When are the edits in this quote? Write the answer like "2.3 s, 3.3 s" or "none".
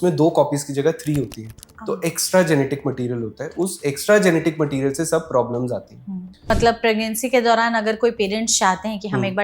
6.5 s